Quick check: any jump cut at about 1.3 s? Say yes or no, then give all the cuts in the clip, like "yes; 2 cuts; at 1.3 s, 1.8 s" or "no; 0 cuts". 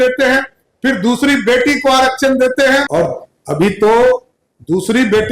no; 1 cut; at 2.9 s